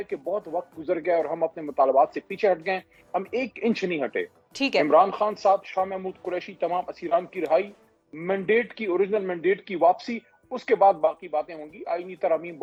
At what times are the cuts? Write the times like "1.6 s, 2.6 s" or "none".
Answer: none